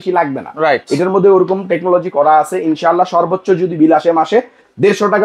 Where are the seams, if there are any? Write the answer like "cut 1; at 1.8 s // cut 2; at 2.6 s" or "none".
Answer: none